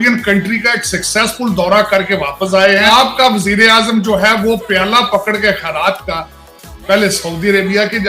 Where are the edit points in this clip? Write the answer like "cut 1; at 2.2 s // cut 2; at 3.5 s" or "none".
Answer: cut 1; at 2.9 s